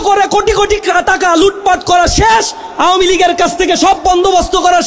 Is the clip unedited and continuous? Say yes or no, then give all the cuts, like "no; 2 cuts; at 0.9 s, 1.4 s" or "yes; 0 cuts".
yes; 0 cuts